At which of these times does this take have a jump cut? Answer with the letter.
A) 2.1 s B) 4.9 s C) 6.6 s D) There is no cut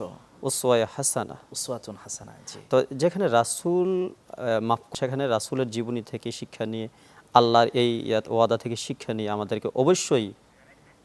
B